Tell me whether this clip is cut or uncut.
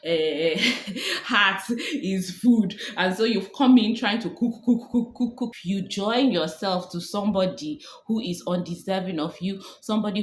cut